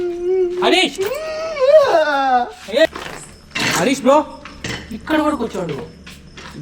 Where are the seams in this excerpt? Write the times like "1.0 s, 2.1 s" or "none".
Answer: 2.9 s